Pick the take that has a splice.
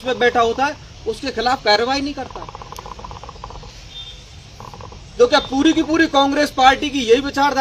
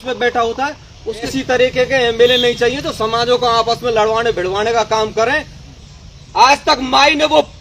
second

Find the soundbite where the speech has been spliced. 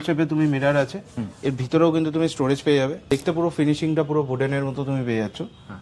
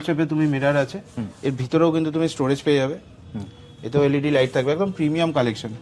first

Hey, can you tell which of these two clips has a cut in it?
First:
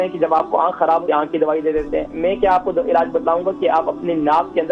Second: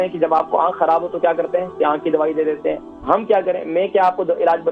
first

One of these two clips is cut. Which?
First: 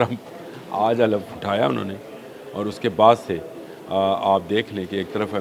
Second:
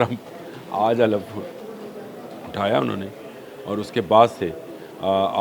first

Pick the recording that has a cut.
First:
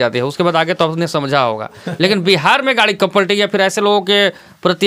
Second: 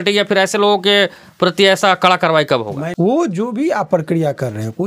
second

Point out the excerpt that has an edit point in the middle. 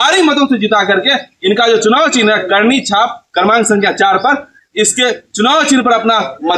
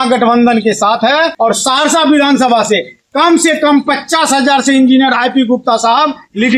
second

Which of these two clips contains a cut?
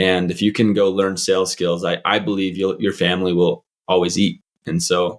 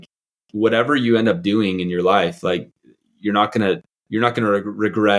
second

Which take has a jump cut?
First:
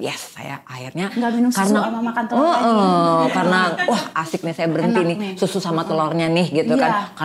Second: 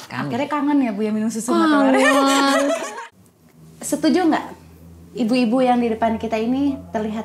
second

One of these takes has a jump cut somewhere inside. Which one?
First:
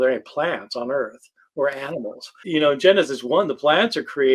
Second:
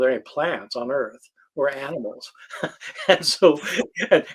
first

